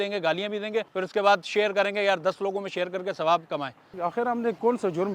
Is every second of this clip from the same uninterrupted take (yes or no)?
no